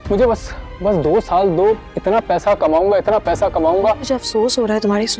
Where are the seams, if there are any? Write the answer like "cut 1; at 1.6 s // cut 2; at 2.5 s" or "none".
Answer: cut 1; at 4.0 s